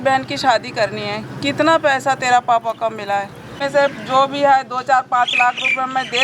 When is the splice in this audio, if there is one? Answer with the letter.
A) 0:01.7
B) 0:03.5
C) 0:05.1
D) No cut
B